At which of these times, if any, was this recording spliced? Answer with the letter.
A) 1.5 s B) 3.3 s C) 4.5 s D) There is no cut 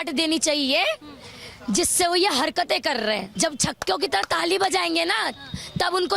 B